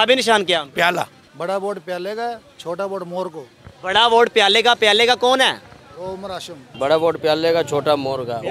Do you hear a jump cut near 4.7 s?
no; 2 cuts; at 1.2 s, 6.6 s

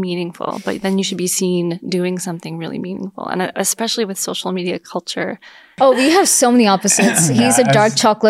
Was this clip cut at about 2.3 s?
no; 1 cut; at 5.7 s

